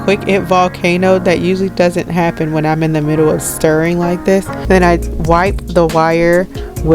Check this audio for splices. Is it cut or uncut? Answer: cut